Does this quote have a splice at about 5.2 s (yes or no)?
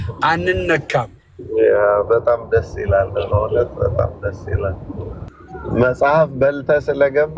yes